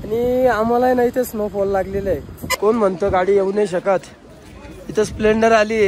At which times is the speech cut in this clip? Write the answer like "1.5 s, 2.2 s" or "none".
2.4 s